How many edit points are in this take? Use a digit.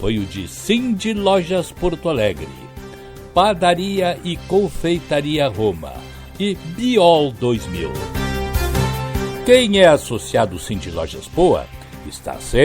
2